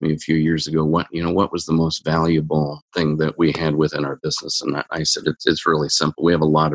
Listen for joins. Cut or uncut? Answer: uncut